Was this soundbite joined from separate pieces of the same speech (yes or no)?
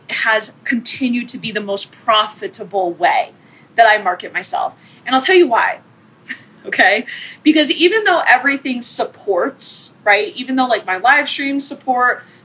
no